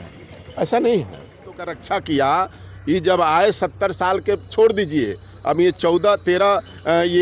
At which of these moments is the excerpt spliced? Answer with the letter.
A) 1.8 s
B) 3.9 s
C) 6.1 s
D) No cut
A